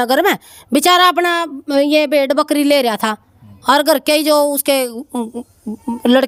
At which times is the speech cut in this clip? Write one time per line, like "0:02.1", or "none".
none